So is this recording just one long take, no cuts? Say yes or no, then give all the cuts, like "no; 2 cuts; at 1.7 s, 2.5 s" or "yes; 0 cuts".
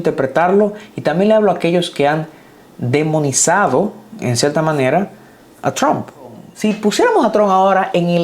no; 1 cut; at 6.4 s